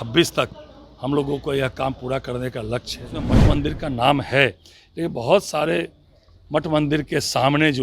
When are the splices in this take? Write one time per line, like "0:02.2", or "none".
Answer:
0:03.4